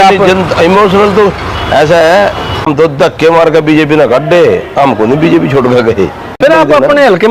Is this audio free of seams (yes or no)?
no